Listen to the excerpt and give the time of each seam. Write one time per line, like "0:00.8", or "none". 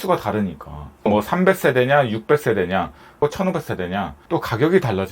0:01.1
0:04.2